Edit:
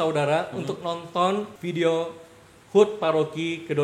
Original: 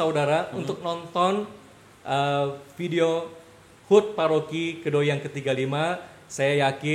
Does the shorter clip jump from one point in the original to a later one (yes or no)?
yes